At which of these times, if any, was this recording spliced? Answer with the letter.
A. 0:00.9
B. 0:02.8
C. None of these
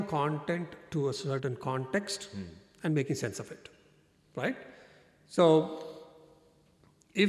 C